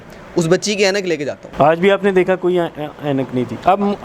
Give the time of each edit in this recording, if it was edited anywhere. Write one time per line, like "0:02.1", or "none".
0:01.4